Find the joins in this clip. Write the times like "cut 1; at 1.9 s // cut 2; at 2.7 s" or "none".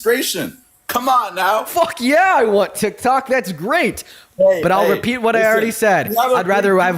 cut 1; at 1.7 s